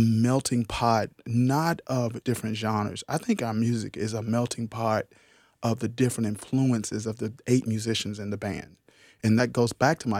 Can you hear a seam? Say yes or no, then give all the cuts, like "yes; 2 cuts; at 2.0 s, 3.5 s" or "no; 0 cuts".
yes; 2 cuts; at 2.2 s, 9.2 s